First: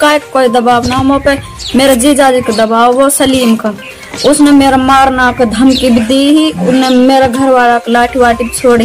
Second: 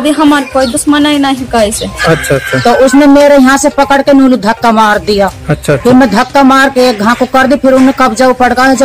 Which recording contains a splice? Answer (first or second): second